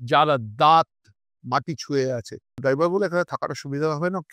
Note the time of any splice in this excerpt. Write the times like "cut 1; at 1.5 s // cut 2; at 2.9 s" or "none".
cut 1; at 2.6 s

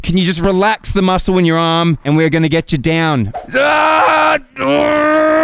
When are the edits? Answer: cut 1; at 3.4 s

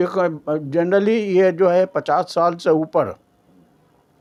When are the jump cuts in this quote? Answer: none

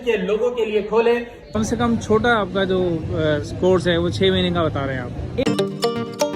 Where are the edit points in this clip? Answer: cut 1; at 1.5 s // cut 2; at 5.4 s

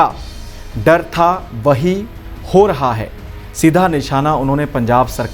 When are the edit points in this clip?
none

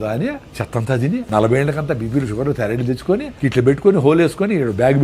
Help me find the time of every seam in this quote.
cut 1; at 1.1 s // cut 2; at 3.3 s

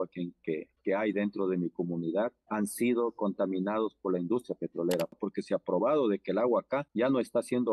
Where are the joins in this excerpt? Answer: cut 1; at 5.2 s // cut 2; at 6.8 s

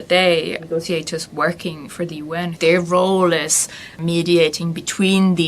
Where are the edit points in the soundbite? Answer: cut 1; at 2.5 s // cut 2; at 4.0 s

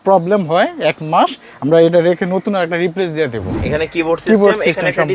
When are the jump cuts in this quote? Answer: cut 1; at 3.5 s

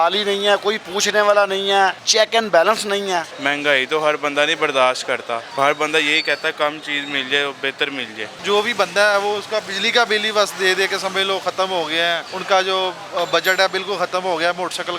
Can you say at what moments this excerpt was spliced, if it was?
cut 1; at 2.0 s // cut 2; at 3.3 s // cut 3; at 5.5 s // cut 4; at 8.3 s // cut 5; at 12.3 s

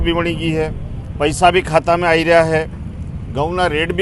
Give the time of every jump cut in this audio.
none

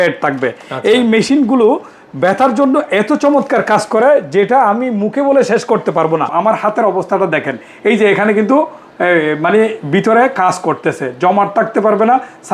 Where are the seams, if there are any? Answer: cut 1; at 6.3 s

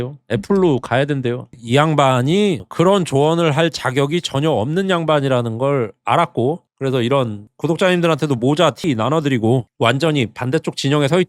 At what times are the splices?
cut 1; at 1.5 s

